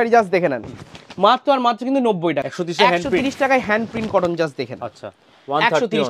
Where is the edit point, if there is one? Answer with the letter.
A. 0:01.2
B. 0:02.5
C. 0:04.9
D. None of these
B